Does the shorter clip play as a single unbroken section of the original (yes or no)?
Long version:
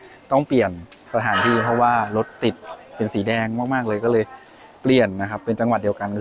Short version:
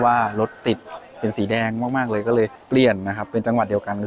no